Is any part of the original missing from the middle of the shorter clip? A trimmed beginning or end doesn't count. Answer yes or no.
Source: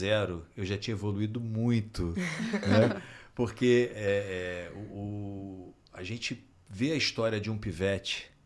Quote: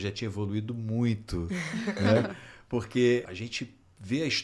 yes